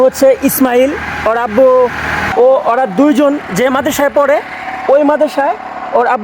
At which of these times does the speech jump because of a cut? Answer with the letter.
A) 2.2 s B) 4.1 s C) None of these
A